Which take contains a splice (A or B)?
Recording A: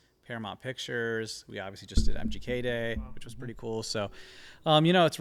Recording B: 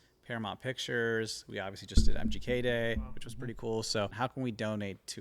B